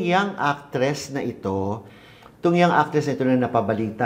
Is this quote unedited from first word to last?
yes; 0 cuts

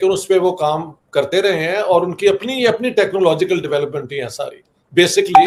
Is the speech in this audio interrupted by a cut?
no; 0 cuts

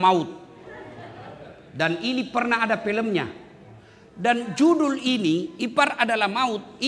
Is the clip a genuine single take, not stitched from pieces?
yes; 0 cuts

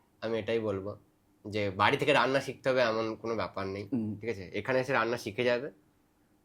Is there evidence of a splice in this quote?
no; 0 cuts

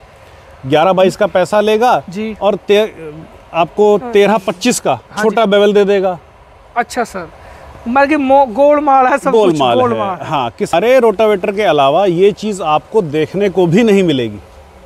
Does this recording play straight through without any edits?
no; 1 cut; at 10.7 s

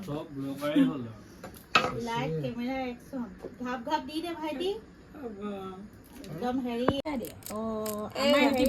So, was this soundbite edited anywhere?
no; 0 cuts

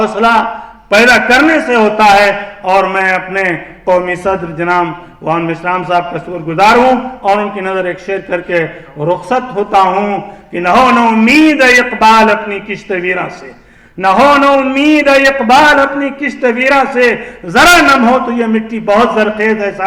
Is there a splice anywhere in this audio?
no; 0 cuts

